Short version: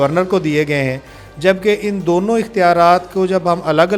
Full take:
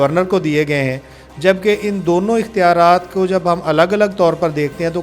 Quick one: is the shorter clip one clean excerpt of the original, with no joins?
yes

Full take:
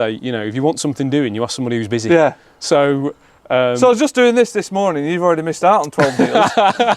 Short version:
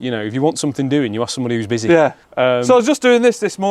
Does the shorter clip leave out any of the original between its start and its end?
yes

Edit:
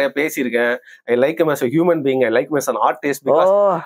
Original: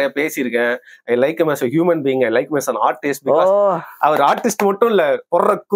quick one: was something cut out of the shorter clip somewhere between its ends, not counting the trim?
no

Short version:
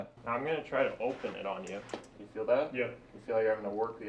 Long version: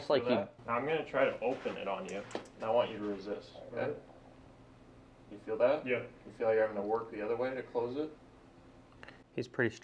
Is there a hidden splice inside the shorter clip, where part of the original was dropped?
yes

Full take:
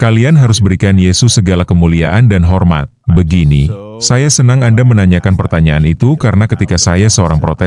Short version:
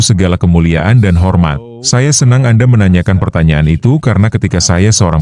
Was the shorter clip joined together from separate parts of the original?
yes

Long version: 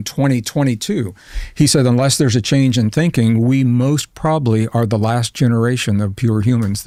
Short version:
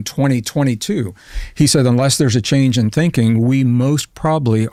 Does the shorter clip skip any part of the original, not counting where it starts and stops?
no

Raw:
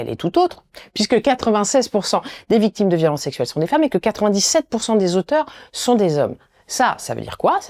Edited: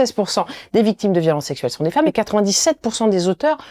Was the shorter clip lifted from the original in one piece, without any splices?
no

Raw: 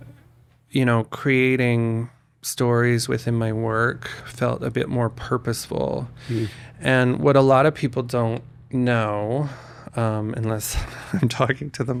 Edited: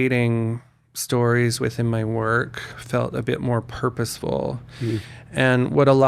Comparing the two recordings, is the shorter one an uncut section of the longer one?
yes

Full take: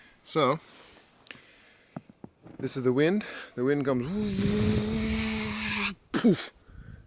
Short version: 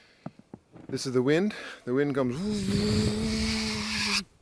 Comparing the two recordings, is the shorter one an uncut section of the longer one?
yes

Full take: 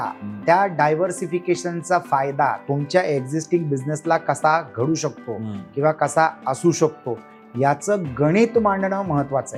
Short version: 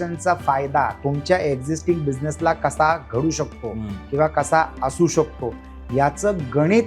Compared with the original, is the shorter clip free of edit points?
yes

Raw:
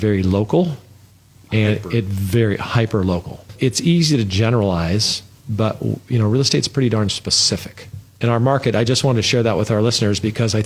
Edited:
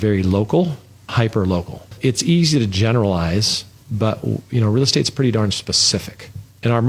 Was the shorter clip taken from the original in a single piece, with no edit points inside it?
no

